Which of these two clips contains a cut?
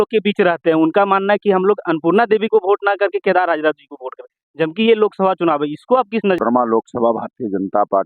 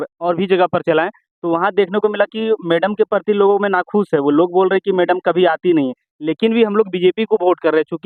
first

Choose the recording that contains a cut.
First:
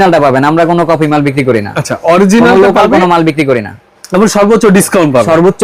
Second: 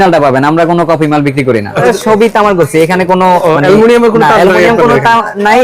second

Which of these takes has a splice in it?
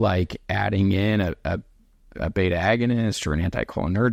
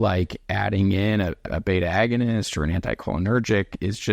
second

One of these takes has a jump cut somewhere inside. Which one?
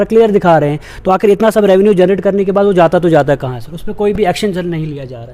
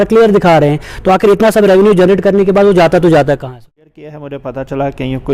second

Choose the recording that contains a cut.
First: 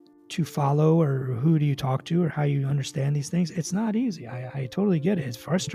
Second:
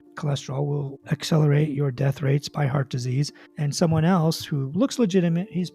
second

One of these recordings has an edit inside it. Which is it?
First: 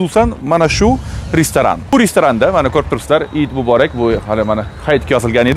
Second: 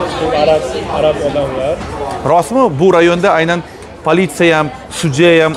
first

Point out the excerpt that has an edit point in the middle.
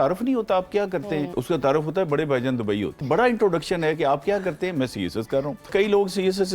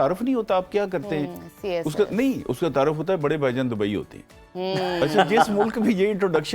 first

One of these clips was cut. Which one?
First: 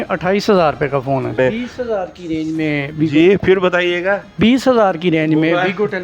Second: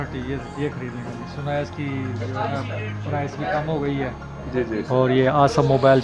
first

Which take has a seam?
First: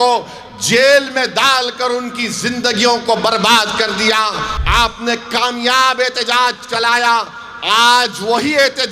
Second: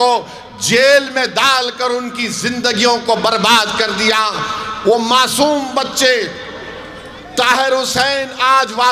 first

